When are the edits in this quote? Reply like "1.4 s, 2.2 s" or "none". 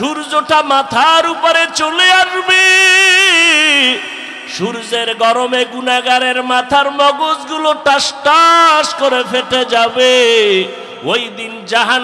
10.9 s